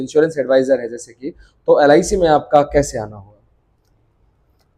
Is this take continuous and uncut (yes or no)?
yes